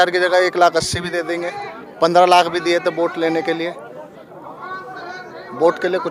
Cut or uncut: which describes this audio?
uncut